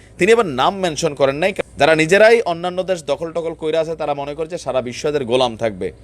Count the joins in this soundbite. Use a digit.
1